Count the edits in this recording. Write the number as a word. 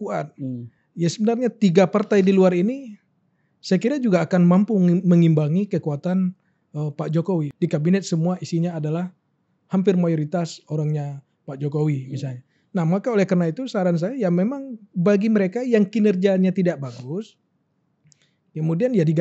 one